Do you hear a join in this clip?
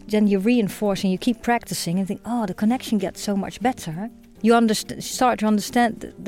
yes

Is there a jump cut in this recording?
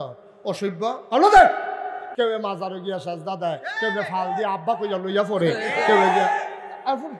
yes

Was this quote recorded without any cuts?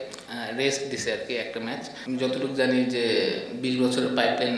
no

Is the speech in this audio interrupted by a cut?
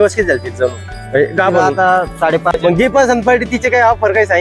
yes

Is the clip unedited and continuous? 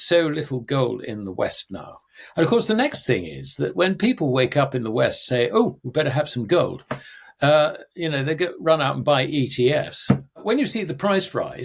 no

